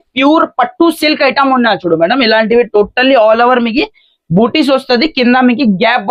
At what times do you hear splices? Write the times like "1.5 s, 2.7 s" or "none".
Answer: none